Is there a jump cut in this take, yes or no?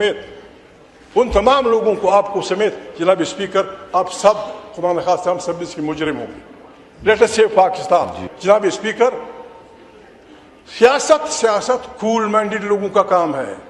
no